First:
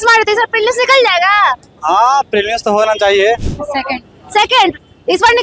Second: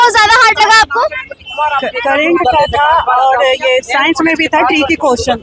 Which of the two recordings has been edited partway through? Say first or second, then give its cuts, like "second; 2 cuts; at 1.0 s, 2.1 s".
first; 1 cut; at 3.5 s